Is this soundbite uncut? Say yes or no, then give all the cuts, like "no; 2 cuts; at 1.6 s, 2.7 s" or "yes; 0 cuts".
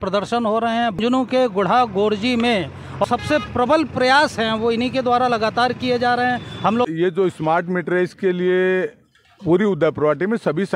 no; 3 cuts; at 1.0 s, 3.0 s, 6.9 s